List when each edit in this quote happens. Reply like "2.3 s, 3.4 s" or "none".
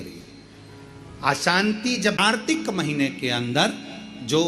2.3 s